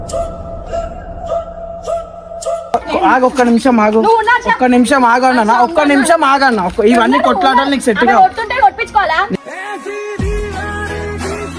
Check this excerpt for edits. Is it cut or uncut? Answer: cut